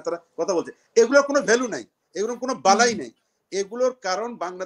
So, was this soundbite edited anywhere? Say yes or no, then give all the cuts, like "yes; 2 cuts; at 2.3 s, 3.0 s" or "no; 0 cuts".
no; 0 cuts